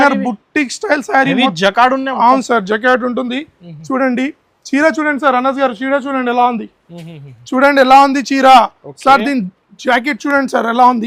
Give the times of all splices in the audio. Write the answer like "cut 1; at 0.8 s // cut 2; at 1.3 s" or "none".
none